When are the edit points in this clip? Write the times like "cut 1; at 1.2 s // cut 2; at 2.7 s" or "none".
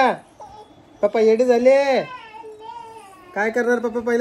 none